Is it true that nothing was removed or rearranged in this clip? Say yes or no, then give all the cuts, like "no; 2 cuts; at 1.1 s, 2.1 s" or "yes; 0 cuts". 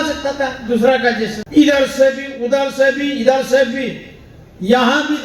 no; 1 cut; at 1.4 s